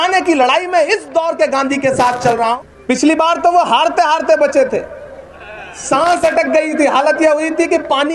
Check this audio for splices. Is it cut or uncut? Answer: cut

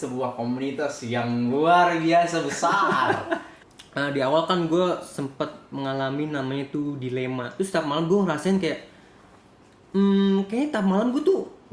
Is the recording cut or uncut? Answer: cut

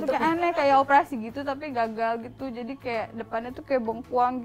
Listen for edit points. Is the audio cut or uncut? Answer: uncut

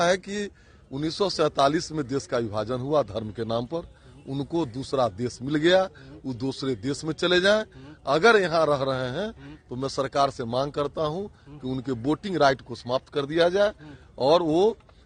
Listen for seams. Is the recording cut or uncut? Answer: uncut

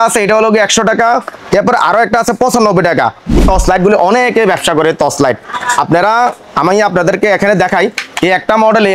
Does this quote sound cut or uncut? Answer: cut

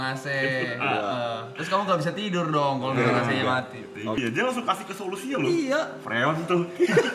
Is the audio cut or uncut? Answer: cut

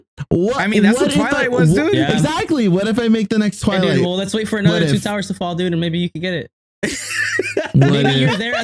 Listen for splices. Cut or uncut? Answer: uncut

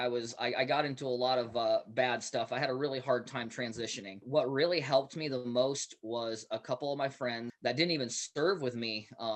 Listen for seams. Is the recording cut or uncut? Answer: cut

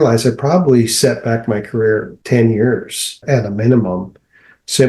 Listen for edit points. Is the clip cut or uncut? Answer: cut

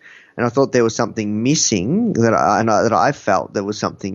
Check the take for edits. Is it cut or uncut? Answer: uncut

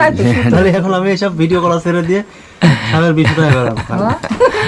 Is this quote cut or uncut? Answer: uncut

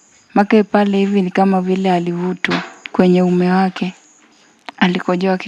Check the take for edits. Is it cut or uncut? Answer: uncut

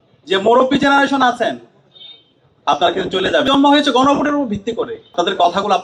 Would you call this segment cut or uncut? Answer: cut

